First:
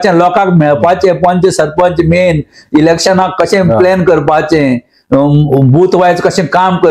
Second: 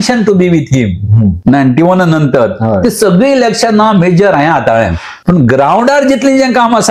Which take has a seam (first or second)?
second